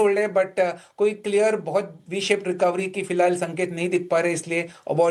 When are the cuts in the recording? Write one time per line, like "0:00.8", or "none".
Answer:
none